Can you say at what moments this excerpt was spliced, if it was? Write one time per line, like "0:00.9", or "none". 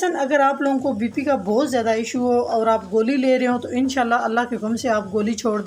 none